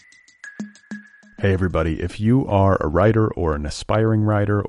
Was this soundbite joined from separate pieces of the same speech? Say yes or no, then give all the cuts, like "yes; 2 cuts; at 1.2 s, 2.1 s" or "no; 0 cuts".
yes; 1 cut; at 1.0 s